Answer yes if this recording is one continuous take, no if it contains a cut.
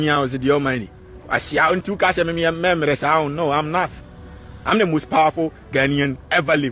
yes